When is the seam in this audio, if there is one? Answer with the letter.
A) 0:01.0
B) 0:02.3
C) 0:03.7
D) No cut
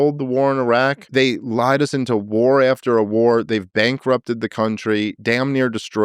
A